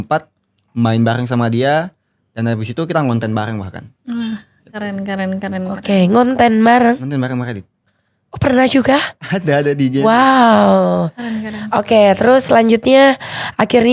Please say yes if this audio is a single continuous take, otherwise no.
yes